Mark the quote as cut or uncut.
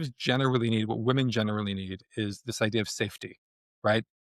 uncut